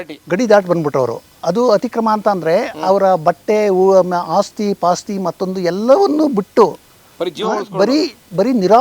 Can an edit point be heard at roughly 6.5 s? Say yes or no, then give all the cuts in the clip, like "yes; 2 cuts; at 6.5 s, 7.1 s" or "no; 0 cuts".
no; 1 cut; at 1.3 s